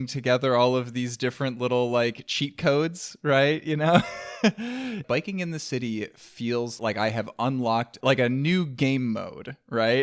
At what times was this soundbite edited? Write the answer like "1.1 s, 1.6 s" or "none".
5.0 s, 6.8 s, 7.9 s